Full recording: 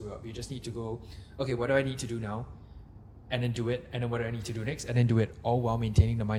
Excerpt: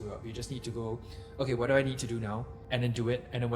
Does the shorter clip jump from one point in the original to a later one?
yes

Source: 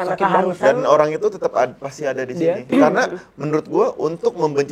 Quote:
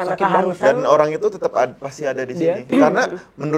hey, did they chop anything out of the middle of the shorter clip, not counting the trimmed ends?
no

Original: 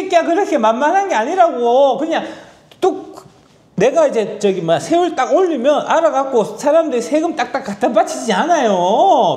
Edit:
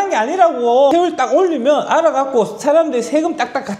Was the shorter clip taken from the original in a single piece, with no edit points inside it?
no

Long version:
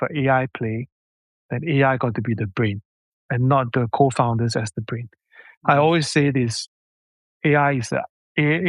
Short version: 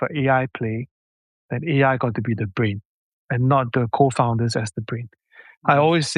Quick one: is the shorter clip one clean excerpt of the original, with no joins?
yes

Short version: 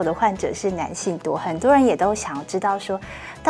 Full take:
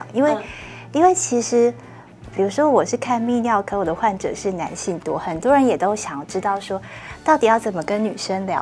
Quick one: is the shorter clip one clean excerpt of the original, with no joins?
yes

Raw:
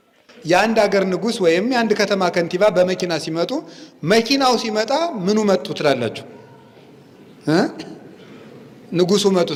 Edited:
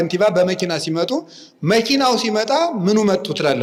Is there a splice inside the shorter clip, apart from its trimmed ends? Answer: no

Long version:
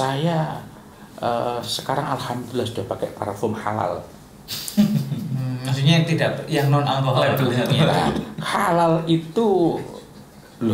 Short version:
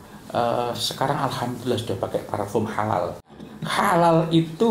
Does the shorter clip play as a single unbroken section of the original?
no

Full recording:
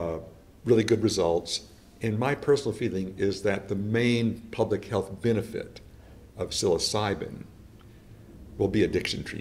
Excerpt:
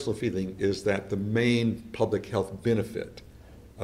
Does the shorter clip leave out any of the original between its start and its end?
no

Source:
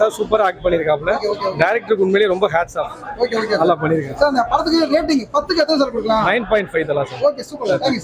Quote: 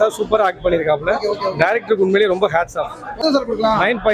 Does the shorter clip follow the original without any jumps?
no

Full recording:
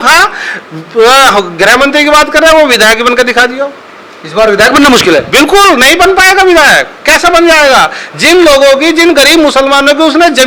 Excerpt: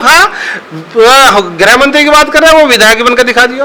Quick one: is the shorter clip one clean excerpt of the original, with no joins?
yes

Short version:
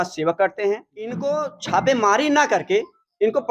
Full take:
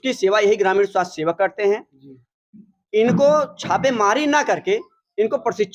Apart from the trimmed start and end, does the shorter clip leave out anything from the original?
yes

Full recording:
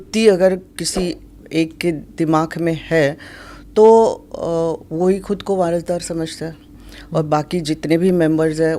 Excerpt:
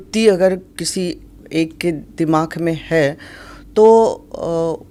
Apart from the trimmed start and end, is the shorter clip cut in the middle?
no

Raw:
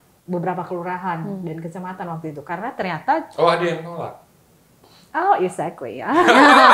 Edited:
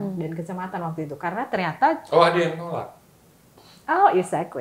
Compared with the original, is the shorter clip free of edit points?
yes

